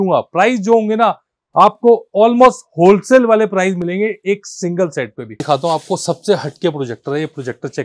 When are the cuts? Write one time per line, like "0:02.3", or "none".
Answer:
0:05.4

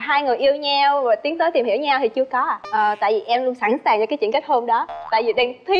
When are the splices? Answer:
0:02.6

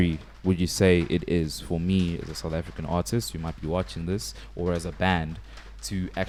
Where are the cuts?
none

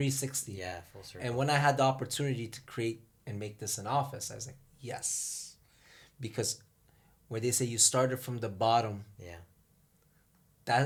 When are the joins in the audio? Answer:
none

